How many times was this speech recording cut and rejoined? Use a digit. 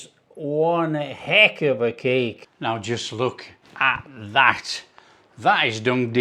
1